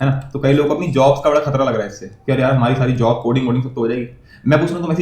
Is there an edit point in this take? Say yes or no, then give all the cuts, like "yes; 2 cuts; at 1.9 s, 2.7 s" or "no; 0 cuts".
no; 0 cuts